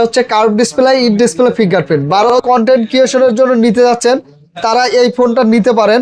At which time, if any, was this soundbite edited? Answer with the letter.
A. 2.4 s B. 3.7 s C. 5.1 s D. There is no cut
A